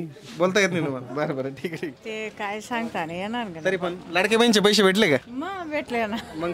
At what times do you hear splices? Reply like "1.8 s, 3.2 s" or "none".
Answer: 1.9 s